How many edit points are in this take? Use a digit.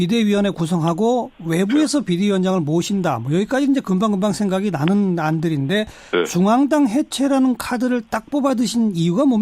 1